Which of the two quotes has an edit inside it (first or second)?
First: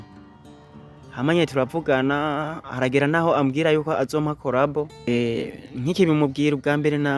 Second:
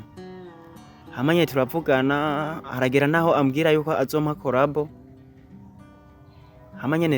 first